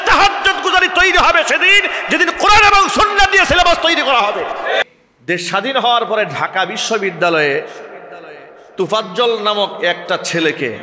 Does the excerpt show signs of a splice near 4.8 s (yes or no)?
yes